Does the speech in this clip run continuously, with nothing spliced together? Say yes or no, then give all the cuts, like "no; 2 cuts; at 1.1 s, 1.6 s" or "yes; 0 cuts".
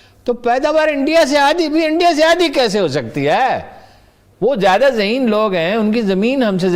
yes; 0 cuts